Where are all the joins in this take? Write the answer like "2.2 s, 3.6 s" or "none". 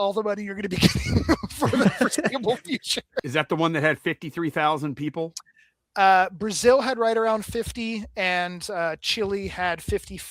3.2 s